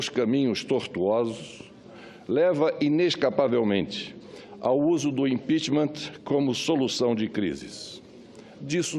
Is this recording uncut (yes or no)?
yes